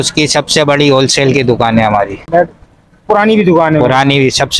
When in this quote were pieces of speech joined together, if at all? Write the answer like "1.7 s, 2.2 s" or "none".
none

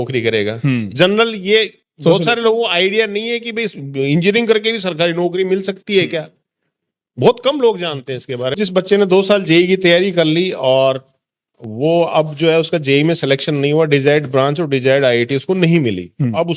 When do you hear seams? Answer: 8.5 s

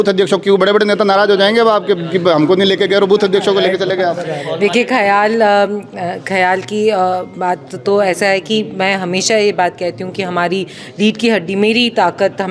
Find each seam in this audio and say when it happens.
none

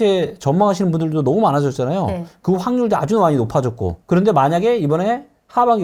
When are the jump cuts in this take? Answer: none

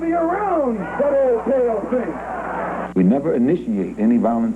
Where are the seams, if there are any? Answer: 2.8 s

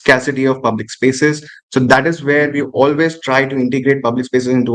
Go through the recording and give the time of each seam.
none

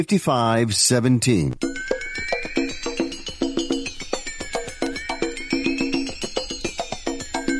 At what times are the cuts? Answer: 1.5 s

